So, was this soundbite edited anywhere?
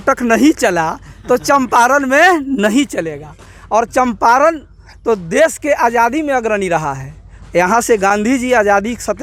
no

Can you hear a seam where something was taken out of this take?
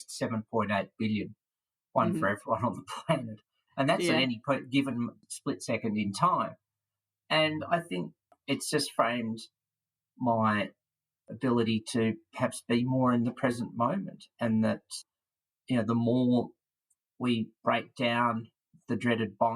yes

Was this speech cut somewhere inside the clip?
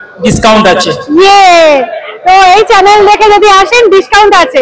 no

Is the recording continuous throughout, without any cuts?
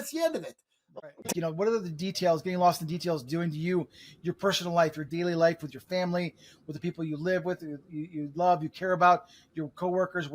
no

